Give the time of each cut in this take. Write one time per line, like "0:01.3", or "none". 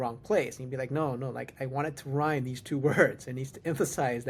none